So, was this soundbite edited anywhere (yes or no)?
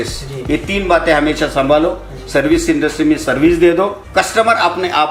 yes